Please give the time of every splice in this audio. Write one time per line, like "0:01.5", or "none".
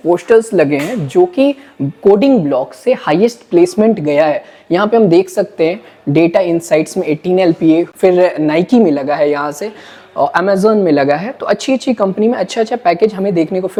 none

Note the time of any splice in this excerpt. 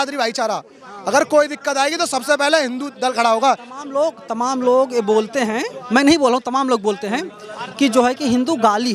none

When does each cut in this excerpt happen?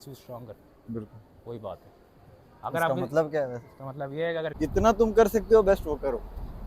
0:04.5

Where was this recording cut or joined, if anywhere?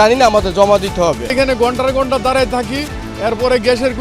0:01.3

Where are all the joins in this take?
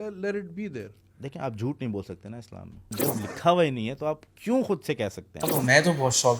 0:02.9
0:05.5

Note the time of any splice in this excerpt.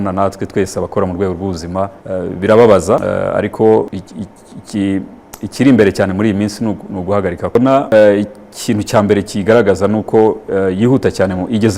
0:02.0
0:03.0
0:04.0
0:07.5

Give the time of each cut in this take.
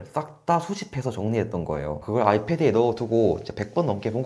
0:02.0

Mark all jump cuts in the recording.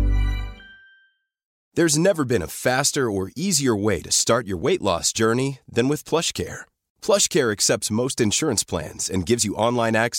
0:01.5

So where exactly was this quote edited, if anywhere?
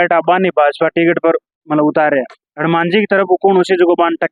none

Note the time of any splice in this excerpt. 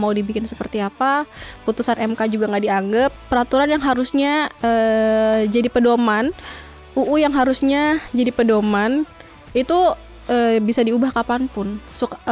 0:03.2

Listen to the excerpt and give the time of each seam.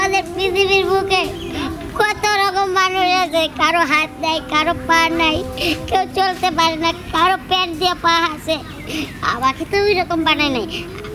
none

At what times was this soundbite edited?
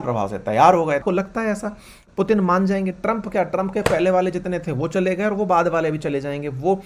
0:01.0

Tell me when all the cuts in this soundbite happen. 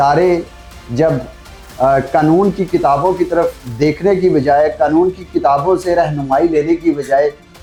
none

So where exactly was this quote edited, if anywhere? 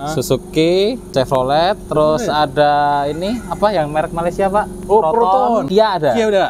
0:01.0
0:05.7

